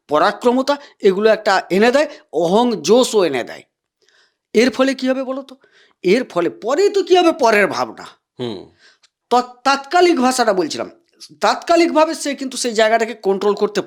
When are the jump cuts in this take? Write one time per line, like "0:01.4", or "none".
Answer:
none